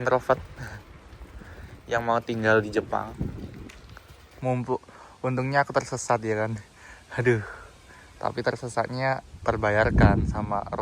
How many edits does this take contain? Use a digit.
1